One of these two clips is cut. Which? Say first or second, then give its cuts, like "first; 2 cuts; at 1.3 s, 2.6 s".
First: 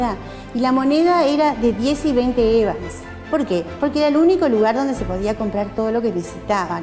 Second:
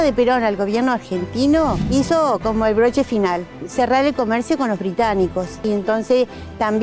second; 3 cuts; at 1.8 s, 3.6 s, 5.6 s